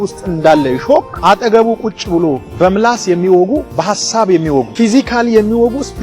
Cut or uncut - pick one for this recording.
cut